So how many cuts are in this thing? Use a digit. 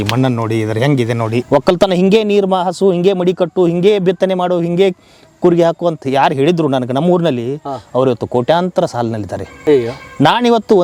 1